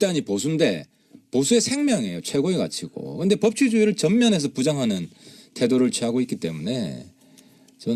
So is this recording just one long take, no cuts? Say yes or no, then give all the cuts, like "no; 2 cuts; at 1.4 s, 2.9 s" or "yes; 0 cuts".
yes; 0 cuts